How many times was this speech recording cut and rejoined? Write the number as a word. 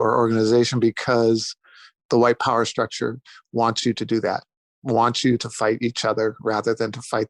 zero